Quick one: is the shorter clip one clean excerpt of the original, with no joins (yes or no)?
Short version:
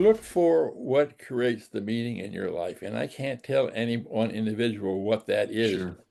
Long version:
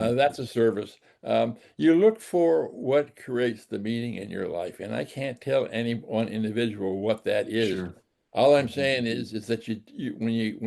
yes